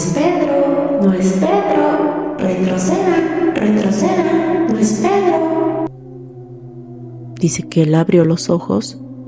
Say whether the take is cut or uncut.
uncut